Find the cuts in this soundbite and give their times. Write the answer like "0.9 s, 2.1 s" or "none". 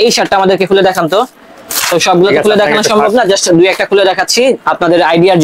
none